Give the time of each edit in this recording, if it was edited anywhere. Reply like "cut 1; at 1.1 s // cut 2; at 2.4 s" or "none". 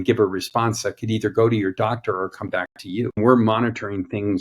cut 1; at 3.2 s